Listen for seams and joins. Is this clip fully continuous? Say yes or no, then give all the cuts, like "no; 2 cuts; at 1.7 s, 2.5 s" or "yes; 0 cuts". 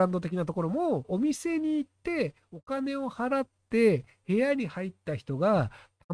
no; 1 cut; at 1.1 s